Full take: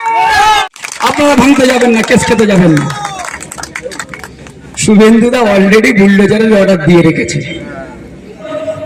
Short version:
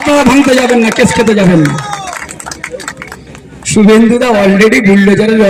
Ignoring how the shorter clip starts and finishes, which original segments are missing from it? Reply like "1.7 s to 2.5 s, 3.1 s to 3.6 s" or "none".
none